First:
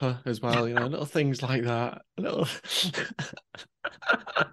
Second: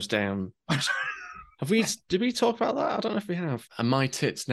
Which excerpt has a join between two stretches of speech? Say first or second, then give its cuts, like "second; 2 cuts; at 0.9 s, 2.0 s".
second; 1 cut; at 3.6 s